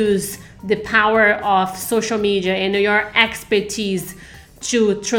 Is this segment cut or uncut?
uncut